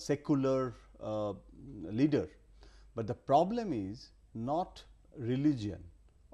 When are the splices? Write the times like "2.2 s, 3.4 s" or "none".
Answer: 4.7 s